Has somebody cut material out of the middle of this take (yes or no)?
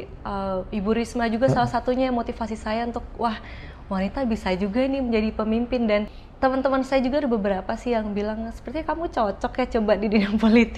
yes